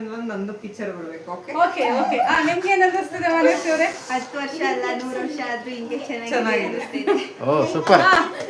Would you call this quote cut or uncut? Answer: uncut